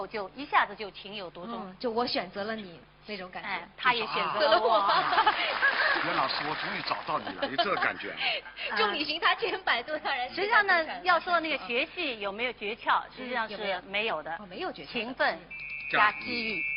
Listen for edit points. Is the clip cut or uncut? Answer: uncut